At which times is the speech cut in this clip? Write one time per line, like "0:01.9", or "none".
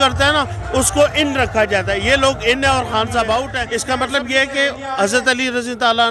0:03.6